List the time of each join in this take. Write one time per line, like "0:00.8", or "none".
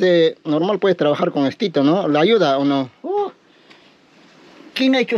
none